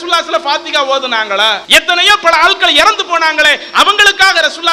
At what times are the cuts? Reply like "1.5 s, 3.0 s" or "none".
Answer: 1.6 s